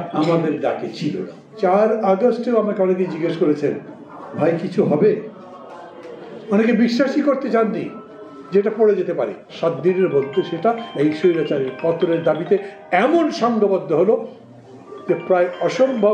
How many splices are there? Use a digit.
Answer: 2